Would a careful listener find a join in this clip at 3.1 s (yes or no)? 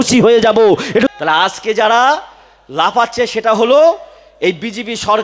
no